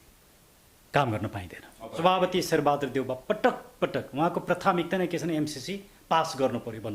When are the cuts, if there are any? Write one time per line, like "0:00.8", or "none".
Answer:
0:01.9